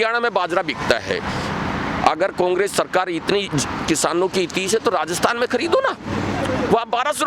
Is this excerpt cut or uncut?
uncut